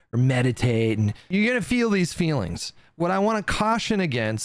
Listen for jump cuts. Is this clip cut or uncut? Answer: cut